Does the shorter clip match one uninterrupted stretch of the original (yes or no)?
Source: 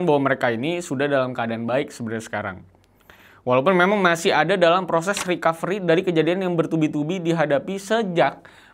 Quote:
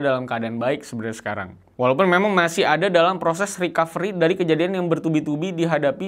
no